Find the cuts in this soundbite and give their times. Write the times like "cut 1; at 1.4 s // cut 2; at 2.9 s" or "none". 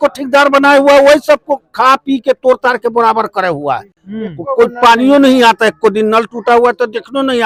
none